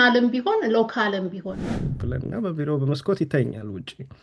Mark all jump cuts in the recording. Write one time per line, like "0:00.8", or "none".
0:01.6